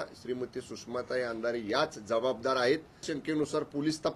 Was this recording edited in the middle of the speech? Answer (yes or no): yes